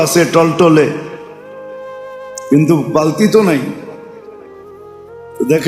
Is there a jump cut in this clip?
yes; 2 cuts; at 1.1 s, 2.5 s

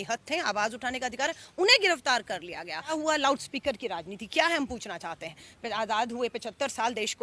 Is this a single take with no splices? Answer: no; 1 cut; at 2.9 s

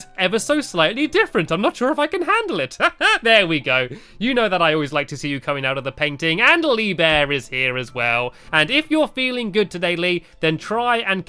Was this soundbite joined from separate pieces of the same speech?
no; 0 cuts

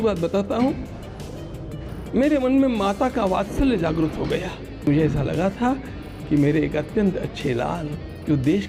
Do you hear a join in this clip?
yes; 1 cut; at 4.9 s

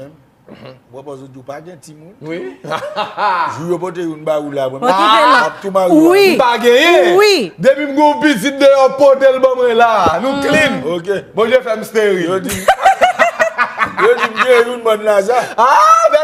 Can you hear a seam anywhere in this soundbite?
yes; 1 cut; at 5.2 s

